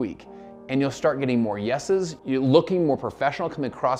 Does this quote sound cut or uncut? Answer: uncut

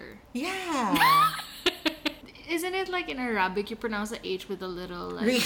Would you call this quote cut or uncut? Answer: cut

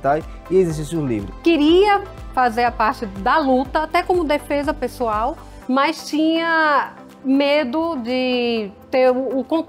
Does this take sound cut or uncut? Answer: cut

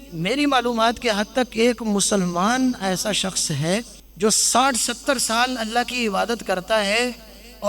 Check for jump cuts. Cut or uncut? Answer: cut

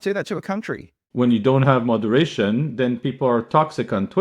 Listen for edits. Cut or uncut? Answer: cut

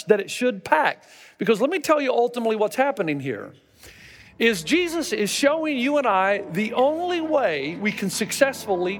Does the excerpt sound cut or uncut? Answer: uncut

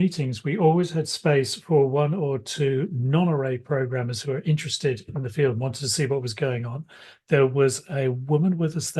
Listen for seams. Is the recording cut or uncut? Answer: uncut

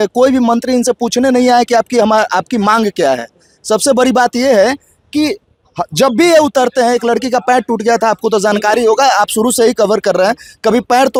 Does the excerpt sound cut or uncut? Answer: uncut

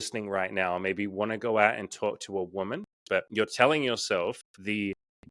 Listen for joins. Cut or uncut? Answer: cut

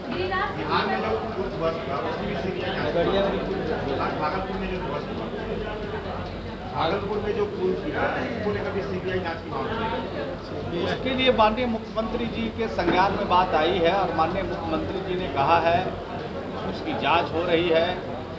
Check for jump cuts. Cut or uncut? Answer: uncut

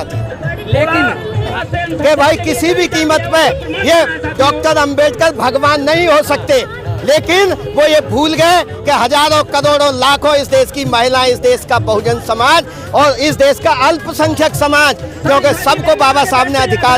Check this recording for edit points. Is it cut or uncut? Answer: cut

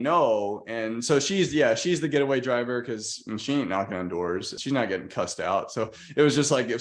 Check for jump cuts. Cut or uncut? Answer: cut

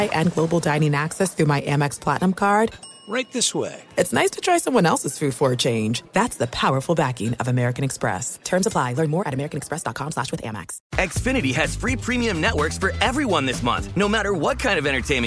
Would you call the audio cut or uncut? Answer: cut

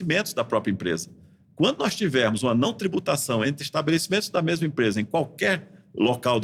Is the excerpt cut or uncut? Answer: uncut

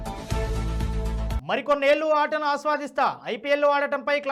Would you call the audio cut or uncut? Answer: uncut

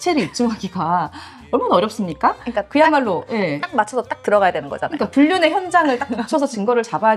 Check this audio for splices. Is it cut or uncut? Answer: uncut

